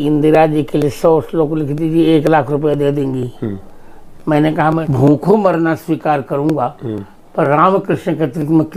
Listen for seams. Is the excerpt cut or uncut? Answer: cut